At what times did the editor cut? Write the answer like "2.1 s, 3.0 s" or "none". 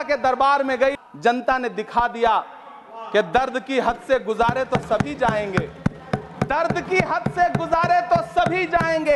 1.0 s